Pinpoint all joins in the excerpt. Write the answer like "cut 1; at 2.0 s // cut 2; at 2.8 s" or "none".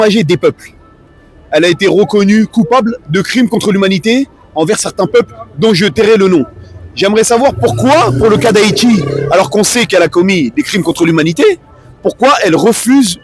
none